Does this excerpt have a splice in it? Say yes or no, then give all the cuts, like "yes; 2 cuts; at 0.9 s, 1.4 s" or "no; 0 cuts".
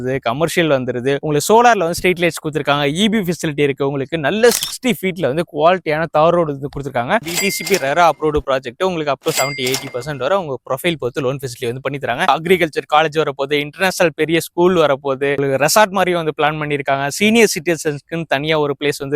yes; 3 cuts; at 1.2 s, 7.2 s, 12.3 s